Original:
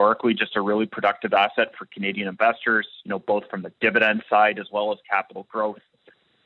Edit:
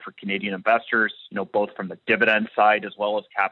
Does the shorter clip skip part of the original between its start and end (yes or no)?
no